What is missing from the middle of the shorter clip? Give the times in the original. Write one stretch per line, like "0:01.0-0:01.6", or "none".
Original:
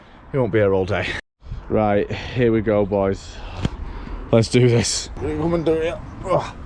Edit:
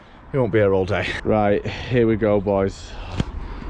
0:01.1-0:01.6